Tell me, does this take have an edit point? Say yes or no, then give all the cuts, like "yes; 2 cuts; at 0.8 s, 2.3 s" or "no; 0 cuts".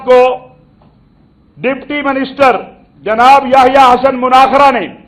no; 0 cuts